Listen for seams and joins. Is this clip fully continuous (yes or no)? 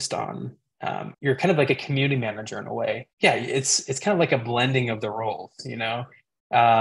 yes